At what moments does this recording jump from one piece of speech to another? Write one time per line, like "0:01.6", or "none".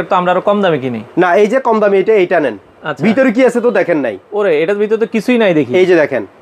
none